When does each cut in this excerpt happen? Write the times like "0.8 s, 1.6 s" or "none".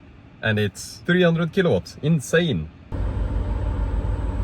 0.9 s, 2.9 s

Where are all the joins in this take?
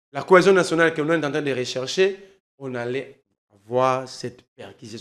none

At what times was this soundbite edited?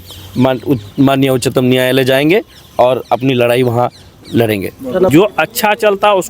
5.1 s

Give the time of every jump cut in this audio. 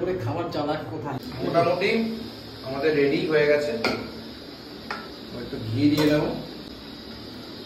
1.3 s, 6.7 s

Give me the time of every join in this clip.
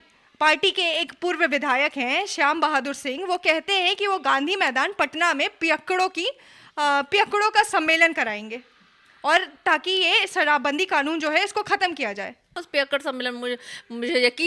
12.6 s

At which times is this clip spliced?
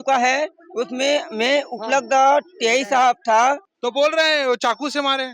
3.7 s

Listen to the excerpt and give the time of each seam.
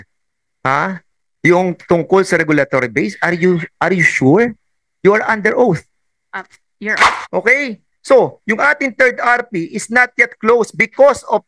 7.0 s

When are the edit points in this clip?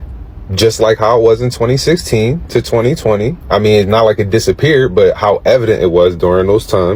none

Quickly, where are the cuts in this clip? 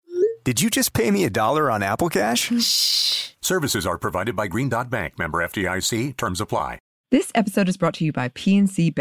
6.9 s

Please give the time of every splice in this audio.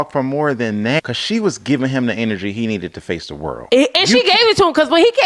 1.0 s, 3.6 s

